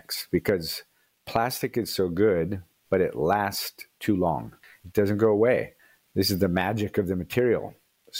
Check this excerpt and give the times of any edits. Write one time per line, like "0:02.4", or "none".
0:04.7